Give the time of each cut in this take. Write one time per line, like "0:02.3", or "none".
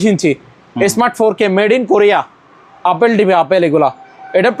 none